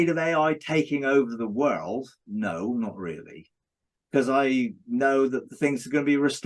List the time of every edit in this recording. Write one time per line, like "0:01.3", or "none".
none

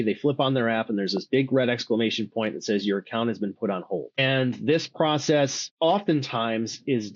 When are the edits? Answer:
0:04.2
0:05.6

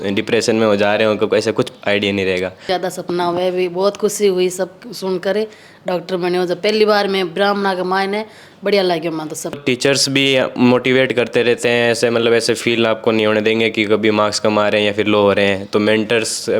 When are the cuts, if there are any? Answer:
0:02.7
0:09.6

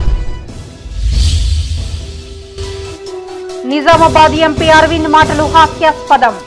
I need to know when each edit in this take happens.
0:01.9

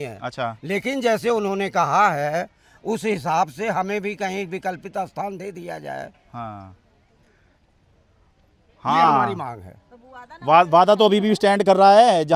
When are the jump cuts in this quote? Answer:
none

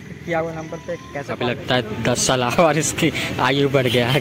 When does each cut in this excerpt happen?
0:01.3

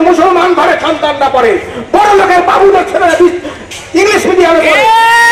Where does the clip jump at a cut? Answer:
none

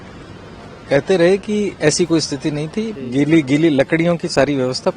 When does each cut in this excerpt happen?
0:03.0

